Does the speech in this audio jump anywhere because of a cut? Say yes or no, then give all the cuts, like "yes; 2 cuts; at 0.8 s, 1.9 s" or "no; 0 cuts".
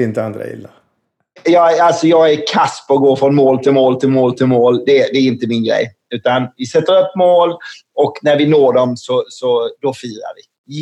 yes; 1 cut; at 1.4 s